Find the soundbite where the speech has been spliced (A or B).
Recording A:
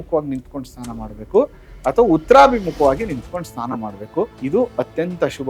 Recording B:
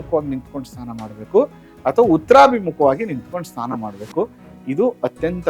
A